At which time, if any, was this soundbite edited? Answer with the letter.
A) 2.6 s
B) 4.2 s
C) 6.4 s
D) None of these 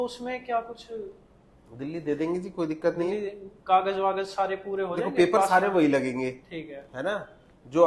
D